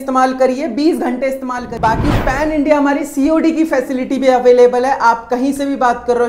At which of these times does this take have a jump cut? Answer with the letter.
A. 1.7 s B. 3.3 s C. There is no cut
A